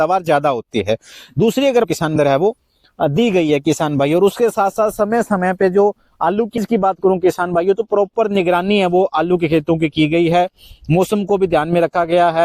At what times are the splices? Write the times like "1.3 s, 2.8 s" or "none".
1.9 s, 6.6 s